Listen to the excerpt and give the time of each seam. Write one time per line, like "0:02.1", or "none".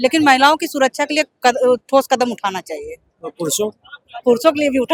none